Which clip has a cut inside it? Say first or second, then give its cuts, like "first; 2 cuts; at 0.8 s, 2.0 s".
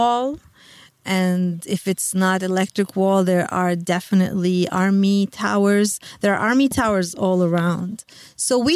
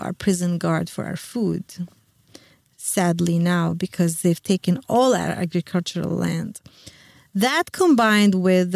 first; 1 cut; at 1.0 s